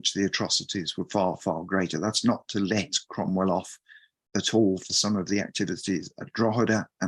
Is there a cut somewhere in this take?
no; 0 cuts

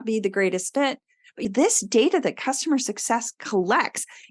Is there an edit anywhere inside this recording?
yes; 1 cut; at 1.4 s

